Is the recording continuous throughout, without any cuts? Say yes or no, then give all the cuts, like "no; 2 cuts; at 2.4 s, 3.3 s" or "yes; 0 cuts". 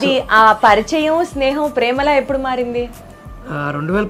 yes; 0 cuts